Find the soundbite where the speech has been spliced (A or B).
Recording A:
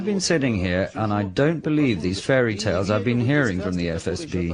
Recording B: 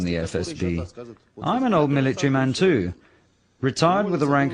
B